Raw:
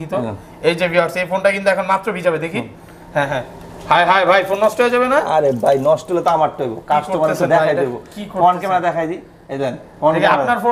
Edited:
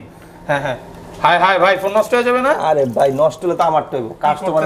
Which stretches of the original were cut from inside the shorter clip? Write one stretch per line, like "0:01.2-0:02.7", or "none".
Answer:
none